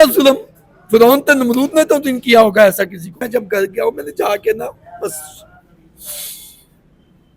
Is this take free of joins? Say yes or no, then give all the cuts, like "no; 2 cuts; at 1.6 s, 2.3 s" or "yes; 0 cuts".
no; 1 cut; at 3.2 s